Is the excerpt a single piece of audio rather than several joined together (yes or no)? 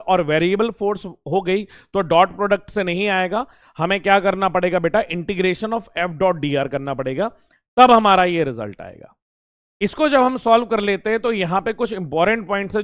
yes